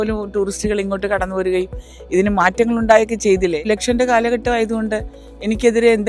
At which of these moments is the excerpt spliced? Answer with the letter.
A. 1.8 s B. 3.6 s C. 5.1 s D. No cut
B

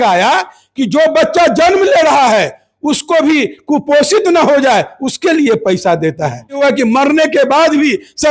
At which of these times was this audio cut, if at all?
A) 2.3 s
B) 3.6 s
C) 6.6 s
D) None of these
C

